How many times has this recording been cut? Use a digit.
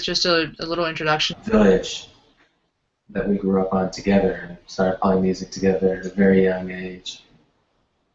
0